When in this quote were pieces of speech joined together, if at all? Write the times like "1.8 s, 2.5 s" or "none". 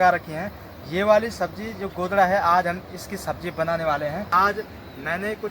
4.3 s